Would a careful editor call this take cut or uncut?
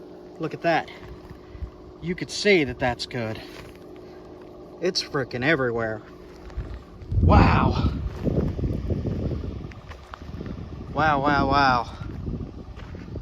uncut